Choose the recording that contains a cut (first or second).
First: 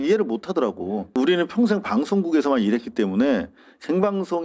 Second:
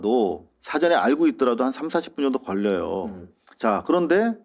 first